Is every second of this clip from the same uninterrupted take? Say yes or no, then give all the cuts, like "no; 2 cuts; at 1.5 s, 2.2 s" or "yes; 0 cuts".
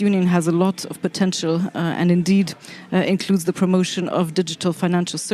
yes; 0 cuts